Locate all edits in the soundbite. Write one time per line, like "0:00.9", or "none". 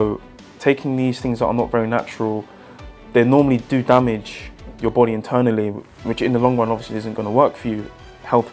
0:04.7